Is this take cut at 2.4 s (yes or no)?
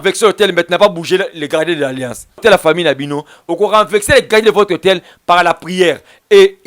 yes